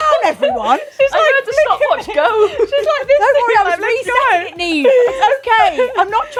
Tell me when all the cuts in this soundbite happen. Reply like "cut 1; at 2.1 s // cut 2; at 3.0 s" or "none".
none